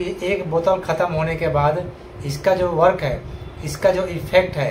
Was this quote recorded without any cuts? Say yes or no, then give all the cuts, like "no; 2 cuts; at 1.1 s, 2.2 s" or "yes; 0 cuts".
yes; 0 cuts